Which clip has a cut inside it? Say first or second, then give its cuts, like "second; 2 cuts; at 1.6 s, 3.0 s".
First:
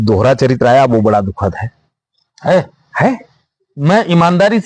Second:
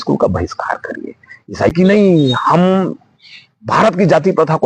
second; 1 cut; at 1.7 s